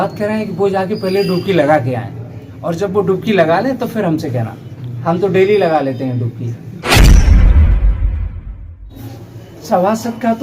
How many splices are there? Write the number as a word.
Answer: two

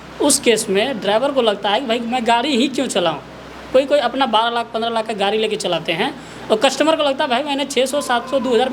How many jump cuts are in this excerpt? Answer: zero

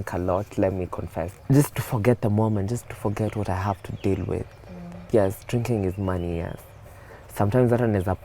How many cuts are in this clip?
one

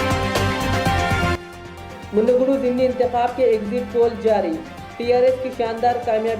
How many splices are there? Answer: one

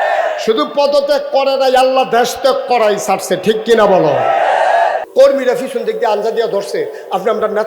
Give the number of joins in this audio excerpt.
one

